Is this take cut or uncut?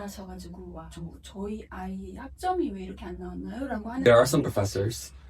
cut